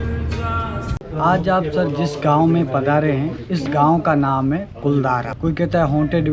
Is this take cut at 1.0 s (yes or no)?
yes